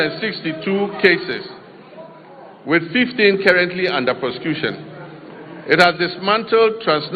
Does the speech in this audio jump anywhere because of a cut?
no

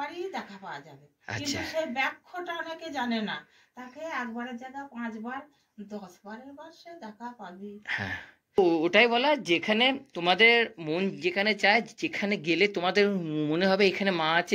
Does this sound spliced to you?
yes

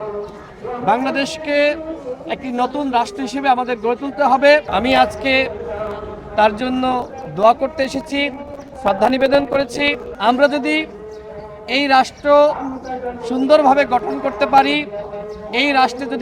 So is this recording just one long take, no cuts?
no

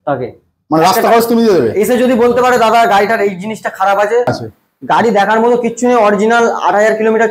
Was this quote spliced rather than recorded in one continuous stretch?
yes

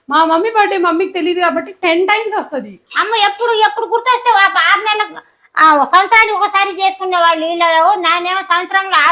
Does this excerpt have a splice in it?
no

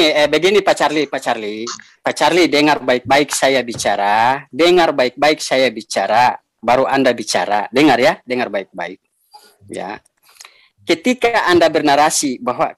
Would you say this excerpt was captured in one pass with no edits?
yes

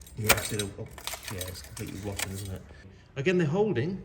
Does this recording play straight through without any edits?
no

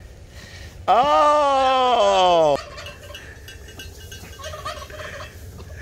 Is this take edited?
yes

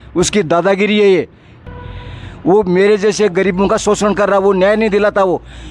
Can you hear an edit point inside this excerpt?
yes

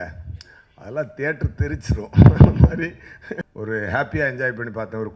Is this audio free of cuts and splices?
no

